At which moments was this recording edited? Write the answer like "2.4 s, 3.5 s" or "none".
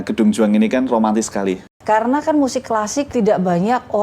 1.7 s, 3.1 s